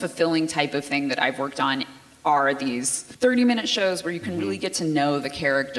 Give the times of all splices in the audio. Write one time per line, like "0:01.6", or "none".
0:03.0